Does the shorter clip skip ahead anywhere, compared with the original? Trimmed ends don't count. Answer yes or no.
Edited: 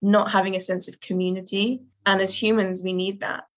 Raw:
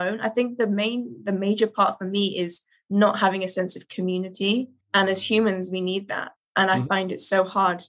no